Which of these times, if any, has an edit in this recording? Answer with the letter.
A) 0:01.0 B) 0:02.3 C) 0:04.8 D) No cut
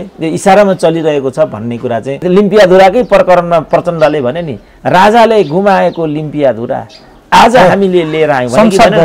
B